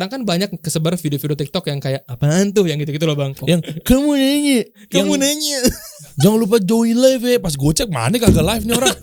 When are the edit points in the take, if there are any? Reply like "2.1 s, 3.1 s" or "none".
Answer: 3.3 s, 6.0 s